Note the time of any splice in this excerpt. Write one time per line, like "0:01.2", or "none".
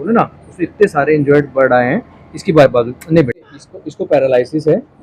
0:03.4